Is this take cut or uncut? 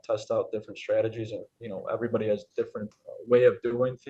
cut